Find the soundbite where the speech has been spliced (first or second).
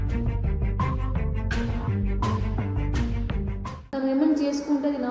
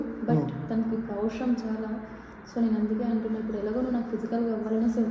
first